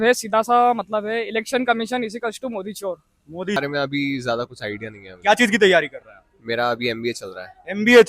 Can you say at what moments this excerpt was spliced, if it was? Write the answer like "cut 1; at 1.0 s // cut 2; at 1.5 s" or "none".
cut 1; at 3.6 s